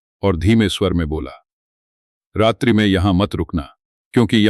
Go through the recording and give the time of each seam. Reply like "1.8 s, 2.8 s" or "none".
none